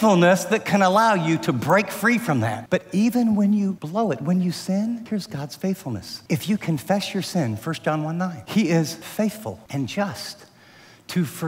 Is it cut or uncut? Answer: cut